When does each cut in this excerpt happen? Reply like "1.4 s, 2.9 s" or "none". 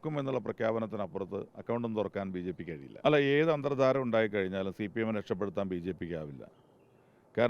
2.8 s